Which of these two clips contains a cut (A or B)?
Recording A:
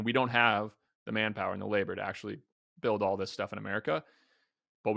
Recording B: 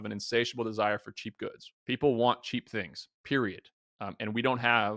B